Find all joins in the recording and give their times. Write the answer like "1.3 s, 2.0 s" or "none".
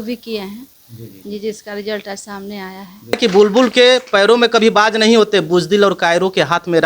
3.1 s